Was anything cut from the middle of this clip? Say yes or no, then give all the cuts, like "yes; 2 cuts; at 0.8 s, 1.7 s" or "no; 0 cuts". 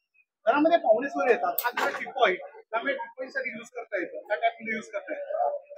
no; 0 cuts